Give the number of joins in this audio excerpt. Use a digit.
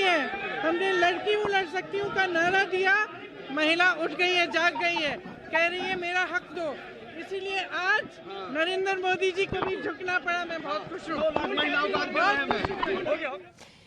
1